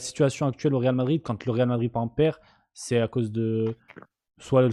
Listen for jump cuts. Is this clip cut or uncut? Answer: uncut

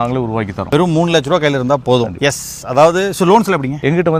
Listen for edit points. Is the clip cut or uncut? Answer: uncut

